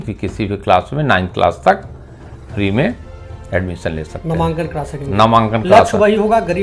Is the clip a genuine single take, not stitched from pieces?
yes; 0 cuts

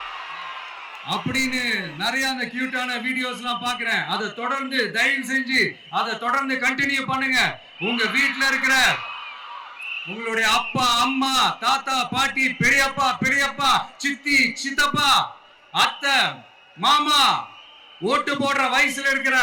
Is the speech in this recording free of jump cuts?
yes; 0 cuts

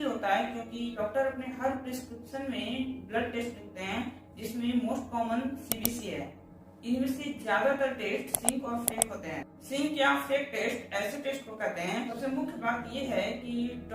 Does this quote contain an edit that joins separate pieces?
yes; 2 cuts; at 0.9 s, 12.1 s

